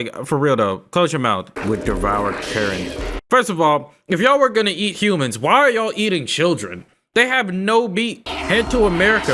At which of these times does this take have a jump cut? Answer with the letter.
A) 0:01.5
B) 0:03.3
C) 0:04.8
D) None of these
A